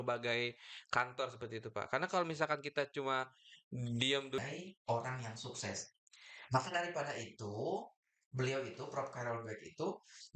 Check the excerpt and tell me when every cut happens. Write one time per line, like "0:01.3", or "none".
0:04.4